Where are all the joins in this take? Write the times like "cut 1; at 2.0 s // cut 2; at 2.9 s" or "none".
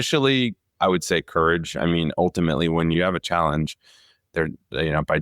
cut 1; at 3.0 s